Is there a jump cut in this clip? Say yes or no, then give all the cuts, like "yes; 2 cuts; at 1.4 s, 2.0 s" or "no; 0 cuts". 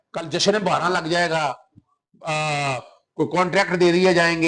no; 0 cuts